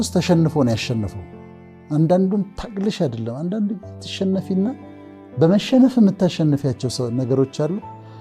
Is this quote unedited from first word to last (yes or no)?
yes